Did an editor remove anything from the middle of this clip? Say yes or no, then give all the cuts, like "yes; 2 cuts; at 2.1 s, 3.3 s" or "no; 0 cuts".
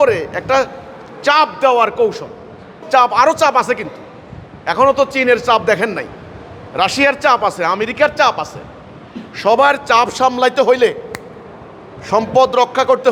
yes; 1 cut; at 2.8 s